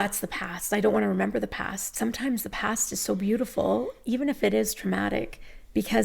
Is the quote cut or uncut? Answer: cut